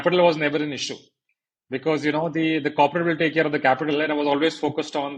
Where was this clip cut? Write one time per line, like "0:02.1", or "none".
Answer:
none